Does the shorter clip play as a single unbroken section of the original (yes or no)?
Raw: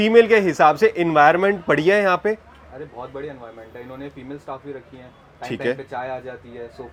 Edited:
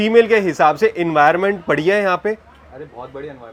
yes